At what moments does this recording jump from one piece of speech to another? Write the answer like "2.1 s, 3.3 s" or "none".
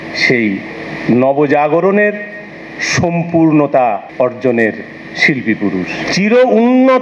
4.1 s, 6.1 s